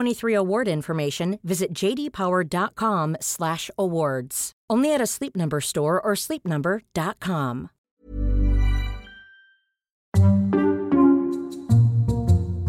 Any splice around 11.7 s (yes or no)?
no